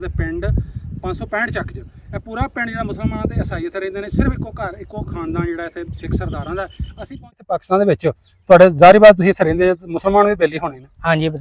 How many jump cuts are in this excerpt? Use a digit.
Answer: 1